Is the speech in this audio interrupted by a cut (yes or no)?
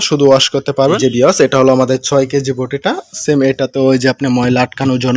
yes